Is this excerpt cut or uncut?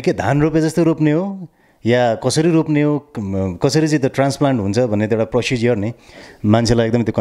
uncut